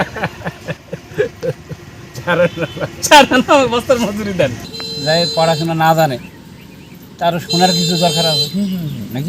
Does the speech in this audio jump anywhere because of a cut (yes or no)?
yes